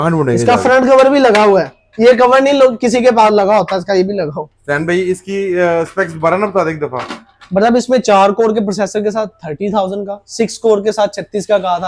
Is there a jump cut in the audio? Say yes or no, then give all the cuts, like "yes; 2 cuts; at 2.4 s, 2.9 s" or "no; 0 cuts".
no; 0 cuts